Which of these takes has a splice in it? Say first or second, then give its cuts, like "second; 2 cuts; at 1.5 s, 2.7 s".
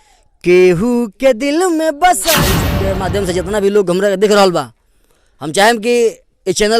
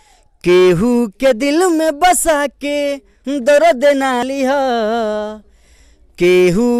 first; 1 cut; at 2.7 s